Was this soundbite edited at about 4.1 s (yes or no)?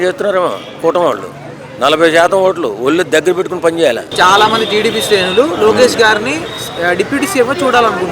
yes